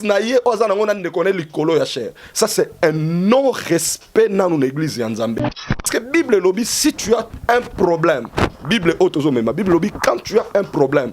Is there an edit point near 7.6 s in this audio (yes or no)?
no